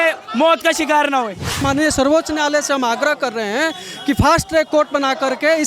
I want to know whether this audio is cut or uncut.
cut